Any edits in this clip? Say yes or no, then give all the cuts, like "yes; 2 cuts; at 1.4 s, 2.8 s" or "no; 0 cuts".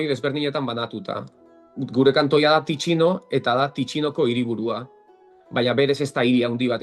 no; 0 cuts